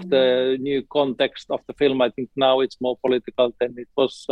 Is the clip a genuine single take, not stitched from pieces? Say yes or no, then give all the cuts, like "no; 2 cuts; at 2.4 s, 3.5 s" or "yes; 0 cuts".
yes; 0 cuts